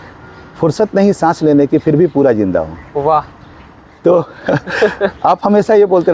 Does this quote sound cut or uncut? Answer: uncut